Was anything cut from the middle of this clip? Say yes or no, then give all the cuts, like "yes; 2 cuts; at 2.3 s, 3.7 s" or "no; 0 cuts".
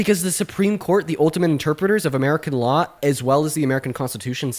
yes; 1 cut; at 2.9 s